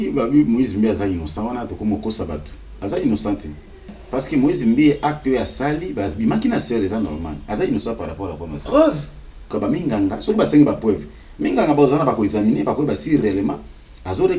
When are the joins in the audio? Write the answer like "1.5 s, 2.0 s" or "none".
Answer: 9.5 s